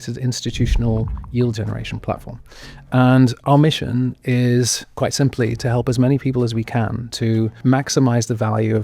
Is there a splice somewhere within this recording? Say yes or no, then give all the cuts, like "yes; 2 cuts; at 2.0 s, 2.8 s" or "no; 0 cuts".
yes; 2 cuts; at 3.4 s, 7.5 s